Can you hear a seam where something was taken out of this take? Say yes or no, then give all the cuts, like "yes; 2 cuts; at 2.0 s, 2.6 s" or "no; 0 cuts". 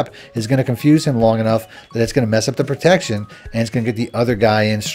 no; 0 cuts